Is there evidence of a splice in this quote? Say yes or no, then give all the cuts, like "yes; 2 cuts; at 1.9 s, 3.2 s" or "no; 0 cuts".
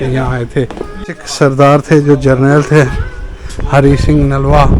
yes; 1 cut; at 1.2 s